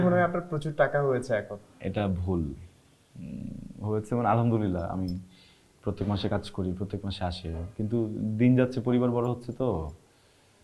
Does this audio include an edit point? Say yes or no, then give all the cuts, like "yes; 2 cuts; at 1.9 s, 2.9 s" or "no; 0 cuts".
no; 0 cuts